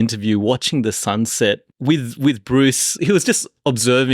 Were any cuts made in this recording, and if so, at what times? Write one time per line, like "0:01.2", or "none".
0:01.7
0:02.9